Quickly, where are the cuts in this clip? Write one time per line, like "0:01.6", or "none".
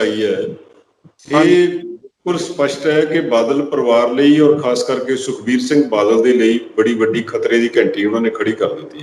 none